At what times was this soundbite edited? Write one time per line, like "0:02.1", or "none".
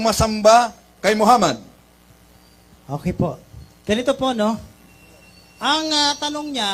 none